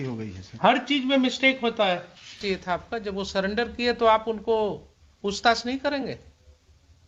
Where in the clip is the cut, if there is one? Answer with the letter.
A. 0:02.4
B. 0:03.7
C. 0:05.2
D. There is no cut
A